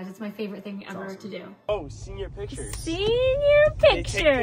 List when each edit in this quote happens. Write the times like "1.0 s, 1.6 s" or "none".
1.7 s

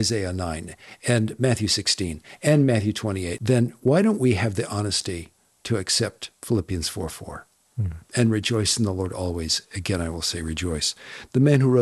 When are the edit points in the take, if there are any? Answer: 3.3 s

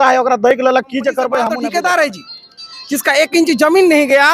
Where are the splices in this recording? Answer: 1.5 s

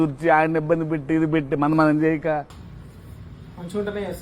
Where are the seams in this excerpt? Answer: 2.5 s

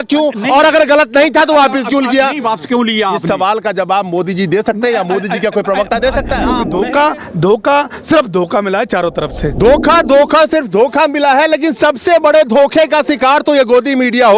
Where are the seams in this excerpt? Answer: 6.5 s

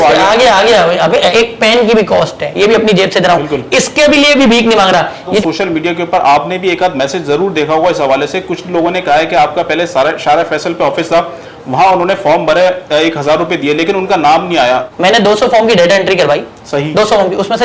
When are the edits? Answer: 1.3 s, 5.4 s, 14.9 s

